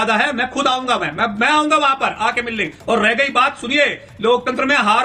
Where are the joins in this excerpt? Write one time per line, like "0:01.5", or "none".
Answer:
none